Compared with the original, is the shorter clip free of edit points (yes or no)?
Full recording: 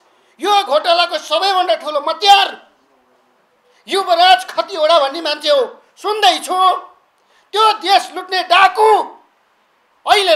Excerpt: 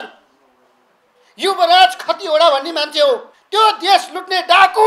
no